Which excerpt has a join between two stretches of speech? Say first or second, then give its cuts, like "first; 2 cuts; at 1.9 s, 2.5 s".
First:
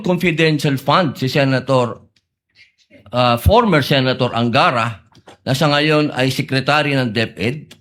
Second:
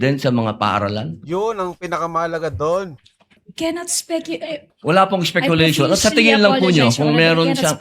second; 2 cuts; at 3.4 s, 4.7 s